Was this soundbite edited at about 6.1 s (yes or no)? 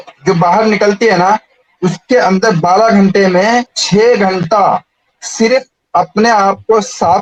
no